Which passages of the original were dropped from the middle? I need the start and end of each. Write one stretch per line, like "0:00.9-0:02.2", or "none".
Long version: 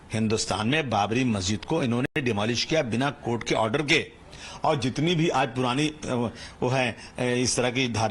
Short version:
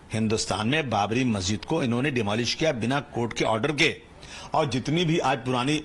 0:02.1-0:02.2